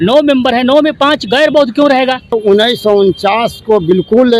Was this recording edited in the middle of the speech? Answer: yes; 1 cut; at 2.3 s

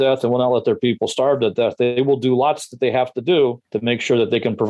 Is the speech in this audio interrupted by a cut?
yes; 1 cut; at 3.7 s

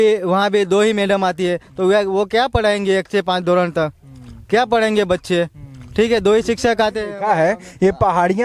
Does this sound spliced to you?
no; 0 cuts

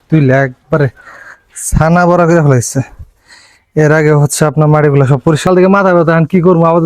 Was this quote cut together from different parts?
yes; 1 cut; at 5.4 s

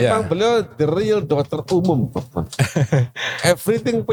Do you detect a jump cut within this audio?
no; 0 cuts

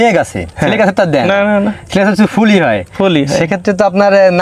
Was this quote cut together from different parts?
no; 0 cuts

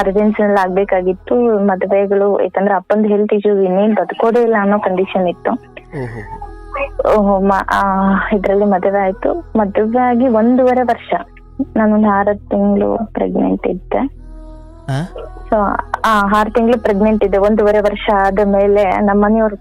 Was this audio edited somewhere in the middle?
no; 0 cuts

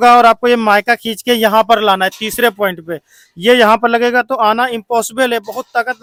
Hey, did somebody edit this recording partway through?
no; 0 cuts

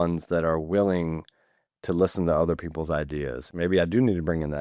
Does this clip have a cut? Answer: yes; 1 cut; at 3.5 s

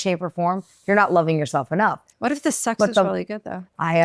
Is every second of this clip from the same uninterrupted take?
no; 1 cut; at 2.1 s

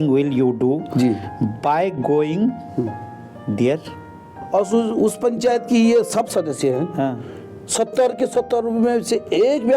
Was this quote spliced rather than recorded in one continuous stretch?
yes; 1 cut; at 4.4 s

